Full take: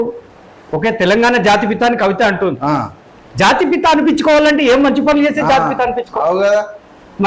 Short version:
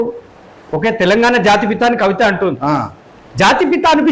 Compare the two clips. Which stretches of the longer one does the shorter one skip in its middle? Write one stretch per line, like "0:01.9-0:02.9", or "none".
none